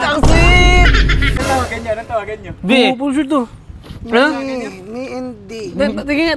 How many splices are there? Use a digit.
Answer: 1